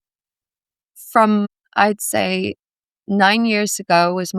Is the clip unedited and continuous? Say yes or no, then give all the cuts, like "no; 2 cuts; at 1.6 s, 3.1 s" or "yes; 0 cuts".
no; 1 cut; at 1.6 s